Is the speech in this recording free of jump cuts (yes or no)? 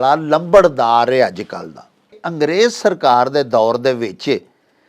no